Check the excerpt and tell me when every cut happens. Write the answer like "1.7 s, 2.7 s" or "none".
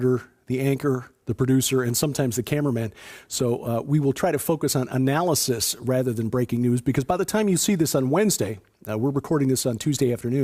3.4 s